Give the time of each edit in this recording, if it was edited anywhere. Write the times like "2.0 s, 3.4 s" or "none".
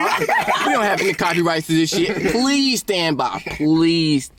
none